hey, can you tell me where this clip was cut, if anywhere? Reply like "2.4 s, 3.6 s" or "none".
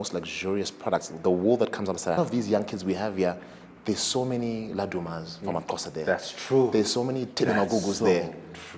2.2 s

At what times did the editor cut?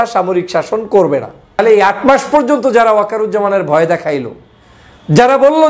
1.6 s

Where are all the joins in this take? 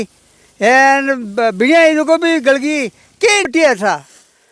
3.5 s

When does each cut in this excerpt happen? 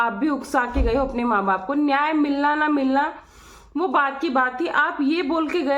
none

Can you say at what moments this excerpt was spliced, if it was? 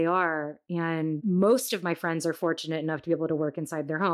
1.0 s

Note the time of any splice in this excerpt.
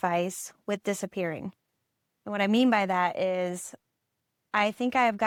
none

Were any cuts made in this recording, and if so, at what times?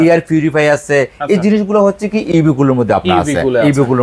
none

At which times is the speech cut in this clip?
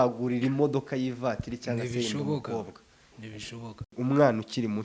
3.9 s

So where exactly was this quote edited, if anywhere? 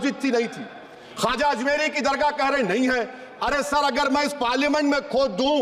none

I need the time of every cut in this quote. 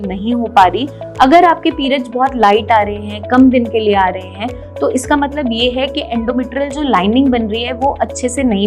1.0 s

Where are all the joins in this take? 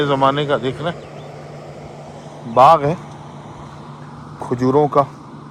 none

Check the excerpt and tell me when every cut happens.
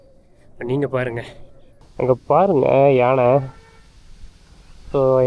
1.4 s

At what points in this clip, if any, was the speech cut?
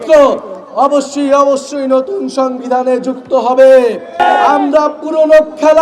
4.2 s

